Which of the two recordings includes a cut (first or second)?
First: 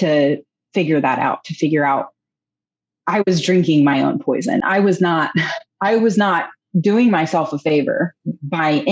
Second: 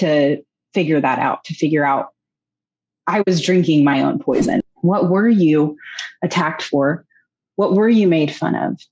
second